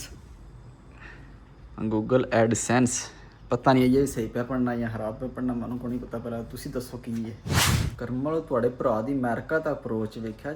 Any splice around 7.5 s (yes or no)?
yes